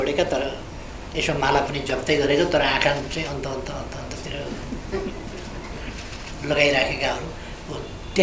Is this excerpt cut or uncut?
uncut